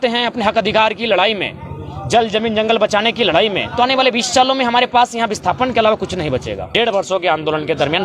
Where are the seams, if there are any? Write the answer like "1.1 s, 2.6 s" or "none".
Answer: 6.6 s